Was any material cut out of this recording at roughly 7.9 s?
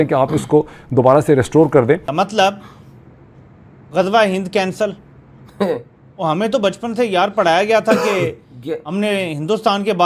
no; 1 cut; at 2.1 s

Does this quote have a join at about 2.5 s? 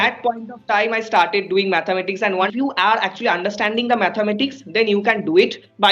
yes; 1 cut; at 2.5 s

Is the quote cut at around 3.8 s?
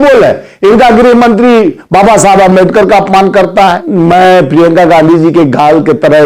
yes; 1 cut; at 3.8 s

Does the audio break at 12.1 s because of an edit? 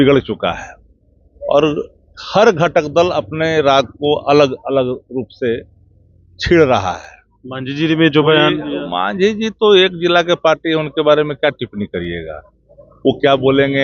no; 0 cuts

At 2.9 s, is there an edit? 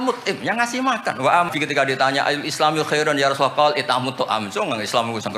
no; 1 cut; at 1.5 s

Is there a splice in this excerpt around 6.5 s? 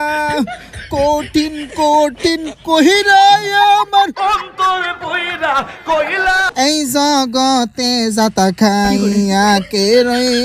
yes; 1 cut; at 6.5 s

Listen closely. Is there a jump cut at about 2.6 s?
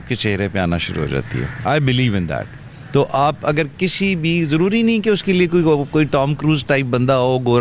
no; 0 cuts

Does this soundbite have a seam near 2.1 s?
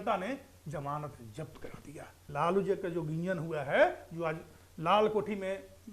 yes; 1 cut; at 2.1 s

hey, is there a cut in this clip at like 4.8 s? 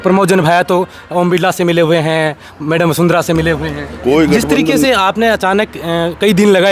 yes; 1 cut; at 4.8 s

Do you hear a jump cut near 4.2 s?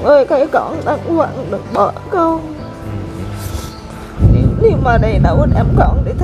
yes; 1 cut; at 4.2 s

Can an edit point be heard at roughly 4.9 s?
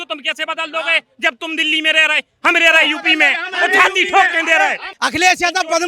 yes; 1 cut; at 4.9 s

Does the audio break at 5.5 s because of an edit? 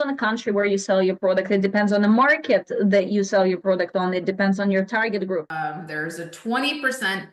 yes; 1 cut; at 5.5 s

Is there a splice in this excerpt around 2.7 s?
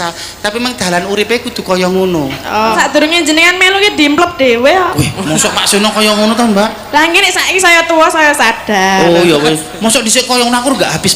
yes; 1 cut; at 2.7 s

